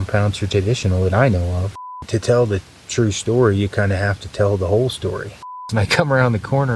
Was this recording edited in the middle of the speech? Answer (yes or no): yes